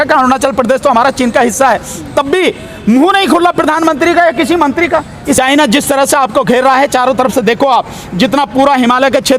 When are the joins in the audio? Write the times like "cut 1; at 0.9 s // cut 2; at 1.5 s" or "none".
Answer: cut 1; at 5.4 s

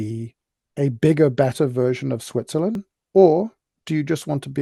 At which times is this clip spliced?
cut 1; at 2.9 s

